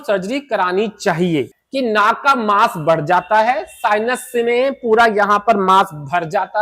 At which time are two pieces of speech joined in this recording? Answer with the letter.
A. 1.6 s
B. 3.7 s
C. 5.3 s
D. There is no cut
A